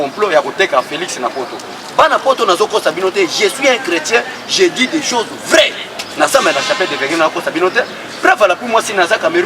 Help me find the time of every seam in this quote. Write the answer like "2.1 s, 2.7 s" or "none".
6.3 s